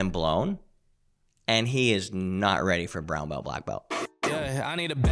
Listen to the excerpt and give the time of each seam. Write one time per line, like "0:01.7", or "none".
0:03.9